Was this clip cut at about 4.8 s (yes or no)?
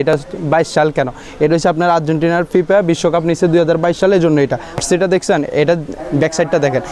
yes